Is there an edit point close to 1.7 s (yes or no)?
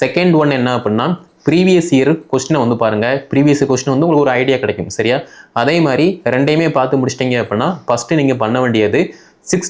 no